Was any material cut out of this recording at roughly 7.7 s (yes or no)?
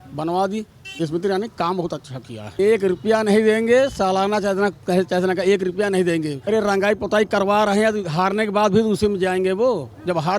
no